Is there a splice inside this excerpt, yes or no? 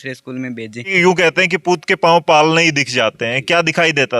yes